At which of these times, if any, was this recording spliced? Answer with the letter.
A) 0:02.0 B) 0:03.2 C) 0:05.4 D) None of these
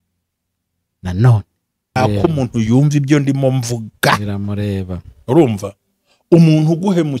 A